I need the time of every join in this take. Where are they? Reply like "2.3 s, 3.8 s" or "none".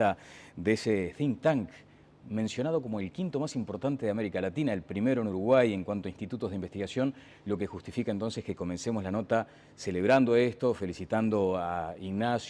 none